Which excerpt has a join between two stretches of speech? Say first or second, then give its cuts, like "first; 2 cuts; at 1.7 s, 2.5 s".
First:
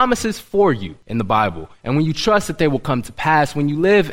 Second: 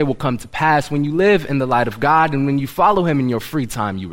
first; 1 cut; at 0.9 s